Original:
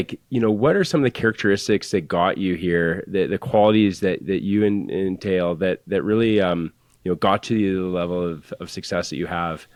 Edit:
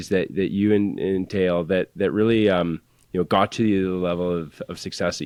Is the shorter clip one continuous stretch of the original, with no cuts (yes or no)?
yes